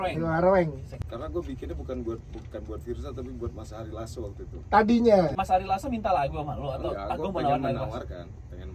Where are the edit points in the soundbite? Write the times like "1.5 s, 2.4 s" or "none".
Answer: 1.0 s, 5.3 s